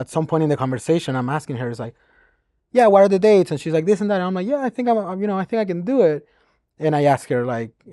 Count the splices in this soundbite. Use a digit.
0